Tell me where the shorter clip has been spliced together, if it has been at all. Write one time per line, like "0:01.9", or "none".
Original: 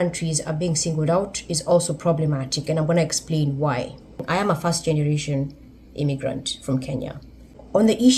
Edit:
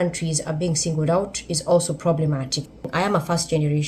0:02.6